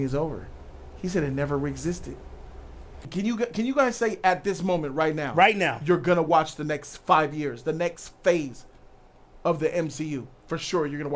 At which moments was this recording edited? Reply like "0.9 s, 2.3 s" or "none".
3.1 s